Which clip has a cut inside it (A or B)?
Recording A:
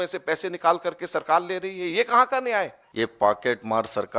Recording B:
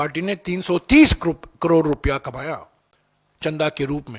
A